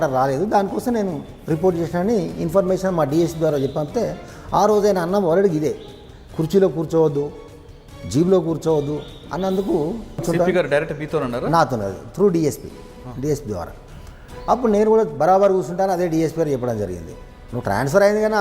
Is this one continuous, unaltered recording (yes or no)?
no